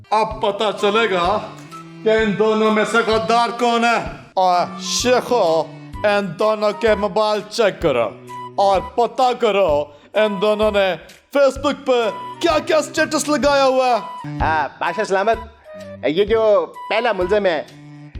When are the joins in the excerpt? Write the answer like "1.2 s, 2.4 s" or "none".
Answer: 14.1 s

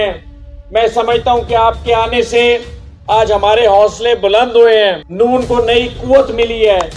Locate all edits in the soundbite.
5.0 s

